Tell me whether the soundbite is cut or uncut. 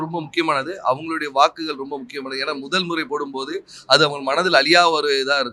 uncut